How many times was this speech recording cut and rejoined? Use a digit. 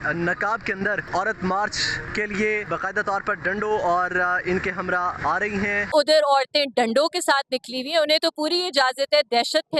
4